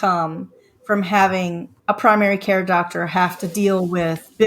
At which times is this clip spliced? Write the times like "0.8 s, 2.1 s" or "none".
1.7 s